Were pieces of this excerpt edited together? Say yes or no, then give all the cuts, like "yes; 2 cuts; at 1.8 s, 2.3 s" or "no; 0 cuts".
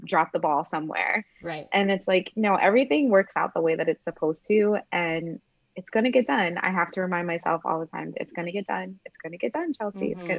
no; 0 cuts